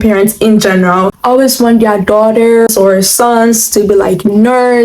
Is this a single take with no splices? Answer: no; 2 cuts; at 1.1 s, 2.7 s

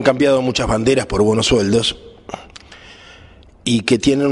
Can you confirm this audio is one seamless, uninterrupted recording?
no; 1 cut; at 1.8 s

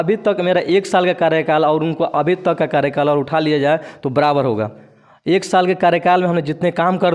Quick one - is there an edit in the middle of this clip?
no; 0 cuts

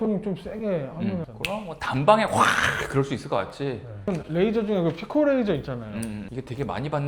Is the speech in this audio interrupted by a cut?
yes; 2 cuts; at 4.1 s, 6.2 s

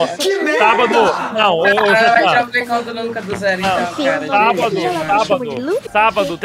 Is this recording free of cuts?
yes; 0 cuts

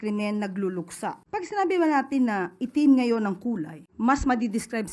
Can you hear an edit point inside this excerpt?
yes; 2 cuts; at 1.2 s, 3.8 s

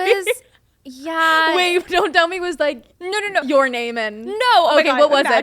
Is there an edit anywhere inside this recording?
yes; 1 cut; at 2.9 s

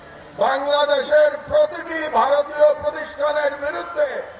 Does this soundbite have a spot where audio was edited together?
no; 0 cuts

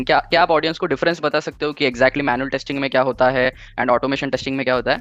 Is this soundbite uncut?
yes; 0 cuts

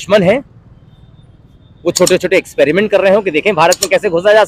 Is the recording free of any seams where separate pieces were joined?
yes; 0 cuts

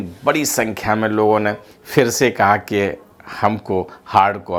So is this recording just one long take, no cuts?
yes; 0 cuts

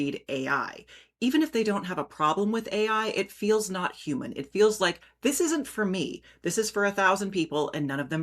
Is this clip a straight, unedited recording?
yes; 0 cuts

